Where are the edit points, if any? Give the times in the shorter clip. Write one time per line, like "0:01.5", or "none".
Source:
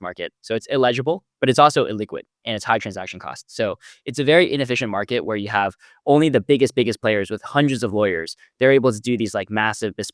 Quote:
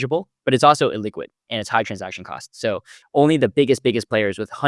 0:03.0